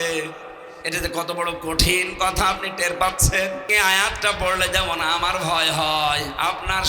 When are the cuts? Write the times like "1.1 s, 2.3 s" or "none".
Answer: 3.7 s